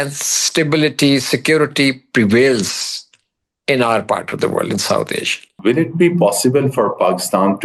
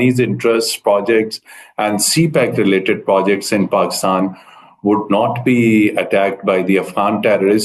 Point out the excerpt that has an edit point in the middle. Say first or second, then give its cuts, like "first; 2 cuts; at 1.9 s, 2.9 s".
first; 1 cut; at 5.5 s